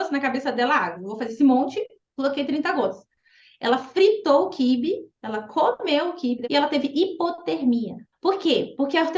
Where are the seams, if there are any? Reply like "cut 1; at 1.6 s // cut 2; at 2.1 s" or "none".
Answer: cut 1; at 6.4 s // cut 2; at 8.0 s